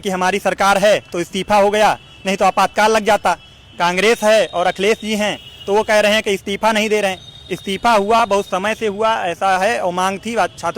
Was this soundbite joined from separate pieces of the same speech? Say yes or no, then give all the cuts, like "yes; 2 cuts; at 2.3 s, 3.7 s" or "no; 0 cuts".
no; 0 cuts